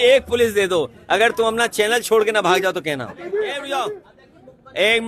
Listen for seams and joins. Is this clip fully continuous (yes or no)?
no